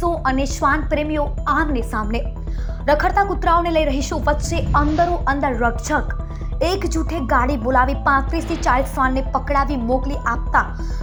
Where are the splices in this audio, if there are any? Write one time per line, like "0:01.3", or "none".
none